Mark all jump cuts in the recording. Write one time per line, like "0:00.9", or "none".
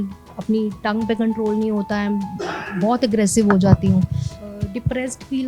0:04.4